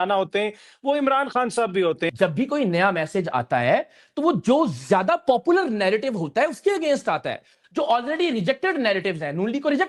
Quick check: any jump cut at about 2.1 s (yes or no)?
yes